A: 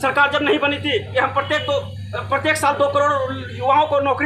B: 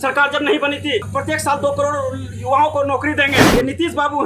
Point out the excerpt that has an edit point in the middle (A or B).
B